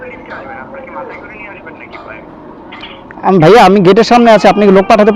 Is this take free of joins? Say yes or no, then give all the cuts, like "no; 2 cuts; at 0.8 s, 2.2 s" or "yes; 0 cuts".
yes; 0 cuts